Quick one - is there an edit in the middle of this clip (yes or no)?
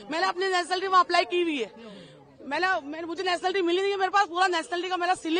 no